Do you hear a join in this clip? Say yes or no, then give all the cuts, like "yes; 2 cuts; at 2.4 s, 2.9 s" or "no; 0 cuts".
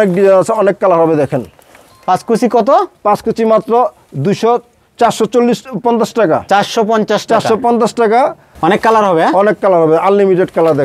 no; 0 cuts